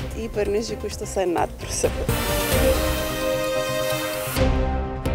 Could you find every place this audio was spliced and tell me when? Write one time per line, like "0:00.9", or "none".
0:02.1